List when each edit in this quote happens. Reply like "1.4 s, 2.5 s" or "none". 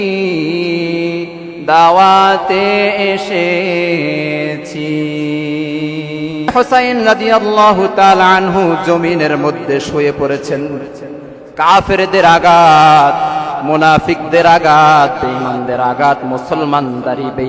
6.5 s